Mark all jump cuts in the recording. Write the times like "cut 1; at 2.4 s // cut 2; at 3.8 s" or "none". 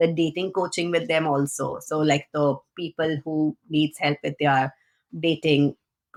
none